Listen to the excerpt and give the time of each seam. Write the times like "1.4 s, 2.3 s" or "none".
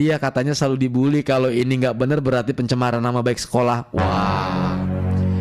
none